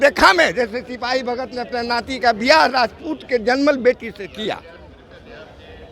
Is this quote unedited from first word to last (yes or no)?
yes